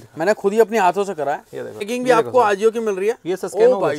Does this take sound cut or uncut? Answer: cut